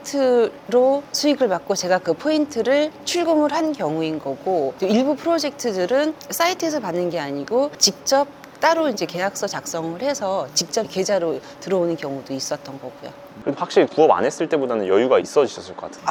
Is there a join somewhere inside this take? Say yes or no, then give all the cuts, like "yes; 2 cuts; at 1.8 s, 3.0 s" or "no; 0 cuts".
no; 0 cuts